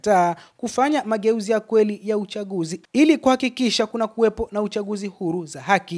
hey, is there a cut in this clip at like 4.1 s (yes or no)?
no